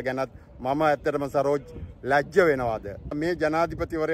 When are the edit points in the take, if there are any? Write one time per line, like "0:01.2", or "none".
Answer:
0:03.1